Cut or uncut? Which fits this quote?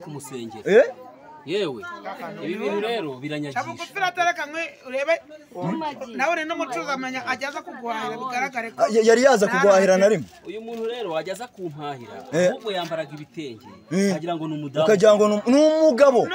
uncut